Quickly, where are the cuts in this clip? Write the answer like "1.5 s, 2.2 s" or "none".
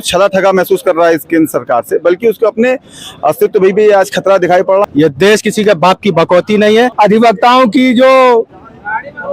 4.8 s, 6.9 s